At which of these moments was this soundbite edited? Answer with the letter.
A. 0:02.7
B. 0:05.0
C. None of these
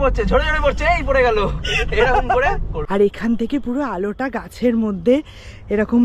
A